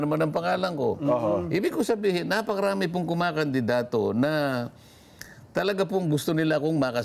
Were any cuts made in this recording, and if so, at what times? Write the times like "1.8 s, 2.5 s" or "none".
none

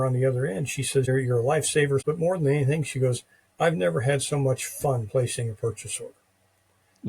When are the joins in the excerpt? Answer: 1.1 s, 2.0 s

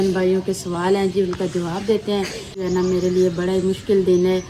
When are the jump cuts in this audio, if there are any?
2.6 s

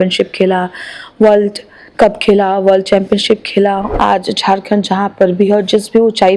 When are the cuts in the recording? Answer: 3.8 s

